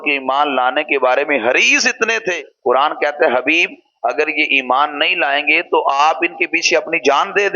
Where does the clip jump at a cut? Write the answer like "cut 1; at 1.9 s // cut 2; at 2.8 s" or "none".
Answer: none